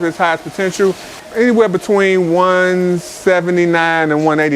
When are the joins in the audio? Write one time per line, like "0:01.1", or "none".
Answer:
0:01.2